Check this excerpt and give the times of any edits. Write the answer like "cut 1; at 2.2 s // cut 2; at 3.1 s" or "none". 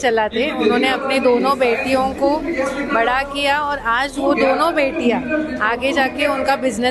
none